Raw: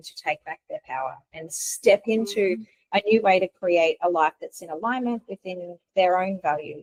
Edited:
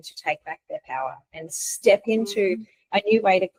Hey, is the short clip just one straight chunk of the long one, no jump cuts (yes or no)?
yes